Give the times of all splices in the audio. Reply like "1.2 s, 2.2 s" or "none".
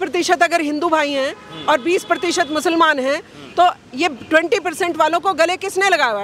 none